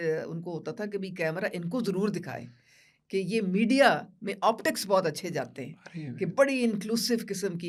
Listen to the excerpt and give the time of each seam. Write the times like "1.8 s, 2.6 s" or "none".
none

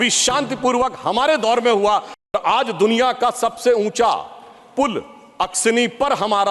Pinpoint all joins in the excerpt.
2.2 s

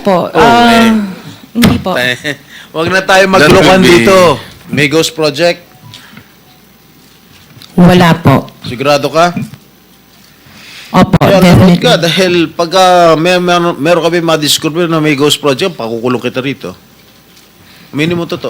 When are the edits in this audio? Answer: 4.7 s

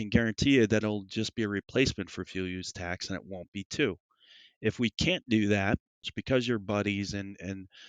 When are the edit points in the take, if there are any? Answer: 6.0 s

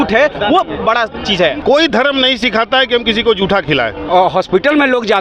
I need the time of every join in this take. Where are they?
1.6 s, 4.0 s

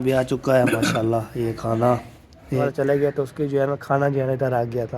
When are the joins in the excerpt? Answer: 2.6 s

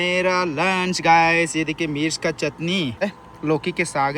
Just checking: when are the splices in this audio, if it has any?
3.0 s

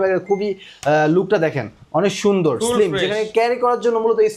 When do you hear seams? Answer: none

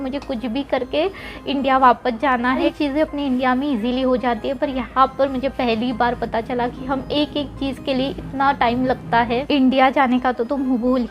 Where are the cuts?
2.7 s, 9.5 s

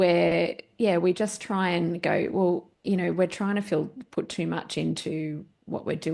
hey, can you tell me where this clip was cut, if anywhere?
2.7 s

